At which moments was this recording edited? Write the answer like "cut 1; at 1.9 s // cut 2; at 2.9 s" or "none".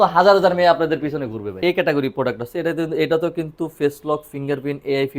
cut 1; at 1.5 s